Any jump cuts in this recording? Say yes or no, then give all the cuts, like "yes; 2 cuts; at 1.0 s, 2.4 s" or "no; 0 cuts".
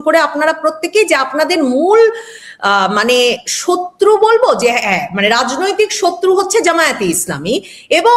no; 0 cuts